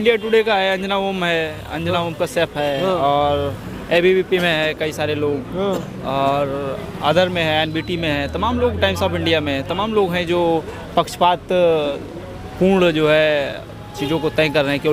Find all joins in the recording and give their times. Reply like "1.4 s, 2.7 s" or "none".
none